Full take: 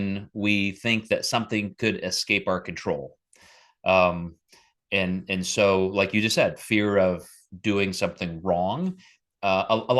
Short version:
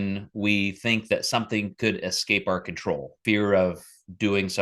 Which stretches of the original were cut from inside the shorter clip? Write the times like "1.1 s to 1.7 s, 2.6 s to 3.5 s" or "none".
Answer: 3.2 s to 6.6 s